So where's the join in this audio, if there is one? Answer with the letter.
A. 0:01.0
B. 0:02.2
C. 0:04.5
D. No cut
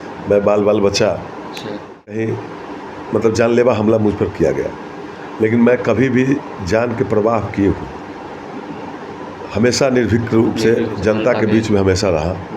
B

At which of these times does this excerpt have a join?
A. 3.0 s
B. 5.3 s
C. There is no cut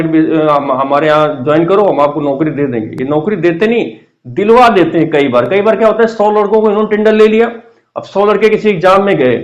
C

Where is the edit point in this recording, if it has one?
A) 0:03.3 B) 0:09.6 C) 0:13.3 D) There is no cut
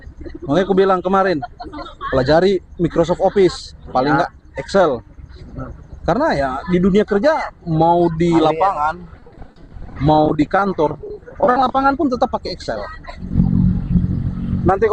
C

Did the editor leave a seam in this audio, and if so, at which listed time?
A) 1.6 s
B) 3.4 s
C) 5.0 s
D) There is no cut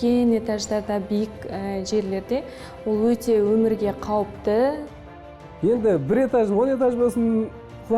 C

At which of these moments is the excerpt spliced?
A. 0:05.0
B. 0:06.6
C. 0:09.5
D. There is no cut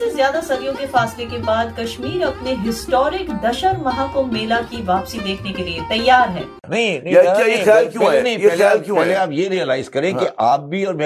B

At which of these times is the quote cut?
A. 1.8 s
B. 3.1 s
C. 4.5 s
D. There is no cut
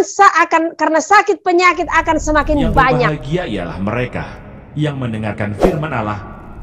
B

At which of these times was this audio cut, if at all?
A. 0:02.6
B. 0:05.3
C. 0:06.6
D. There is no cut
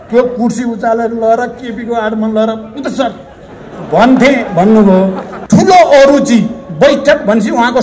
B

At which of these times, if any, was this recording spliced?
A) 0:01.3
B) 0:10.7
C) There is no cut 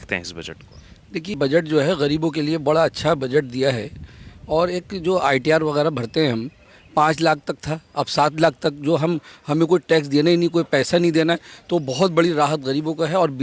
A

